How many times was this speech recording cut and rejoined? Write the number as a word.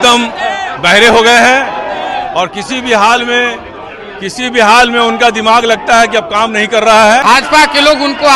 one